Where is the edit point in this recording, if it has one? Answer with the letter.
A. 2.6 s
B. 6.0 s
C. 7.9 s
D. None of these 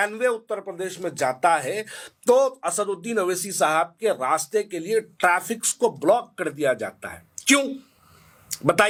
D